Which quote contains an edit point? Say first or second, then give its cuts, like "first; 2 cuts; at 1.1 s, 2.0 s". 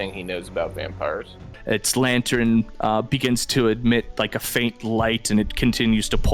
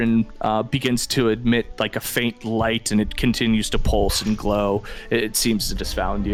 first; 1 cut; at 1.5 s